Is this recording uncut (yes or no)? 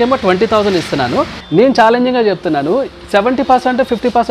no